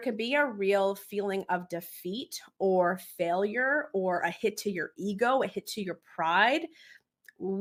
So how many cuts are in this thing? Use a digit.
0